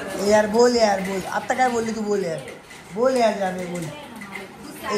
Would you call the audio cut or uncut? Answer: uncut